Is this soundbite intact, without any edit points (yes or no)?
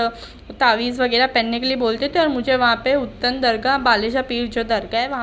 yes